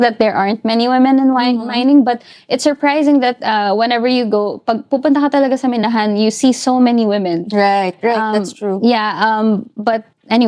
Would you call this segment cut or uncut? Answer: uncut